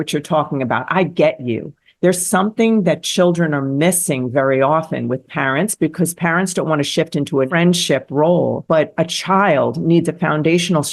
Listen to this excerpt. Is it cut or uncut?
cut